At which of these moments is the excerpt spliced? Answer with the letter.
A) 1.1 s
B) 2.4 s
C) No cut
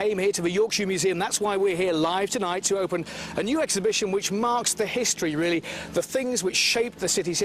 B